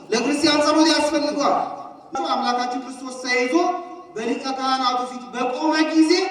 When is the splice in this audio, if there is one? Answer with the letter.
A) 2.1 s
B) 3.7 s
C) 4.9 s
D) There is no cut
A